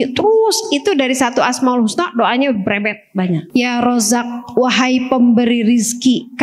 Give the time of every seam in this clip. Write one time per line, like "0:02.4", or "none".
0:03.5